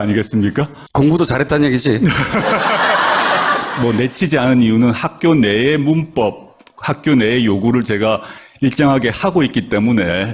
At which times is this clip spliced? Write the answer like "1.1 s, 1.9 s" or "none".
6.1 s